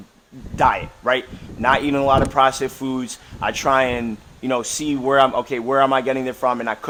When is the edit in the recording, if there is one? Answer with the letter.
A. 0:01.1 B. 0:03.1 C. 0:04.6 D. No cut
D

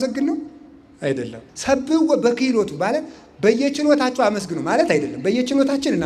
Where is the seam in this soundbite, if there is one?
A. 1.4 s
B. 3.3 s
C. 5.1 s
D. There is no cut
A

